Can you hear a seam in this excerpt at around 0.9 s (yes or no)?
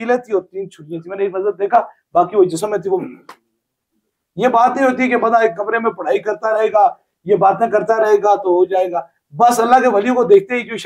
no